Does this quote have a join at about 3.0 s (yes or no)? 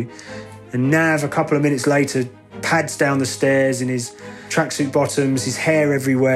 no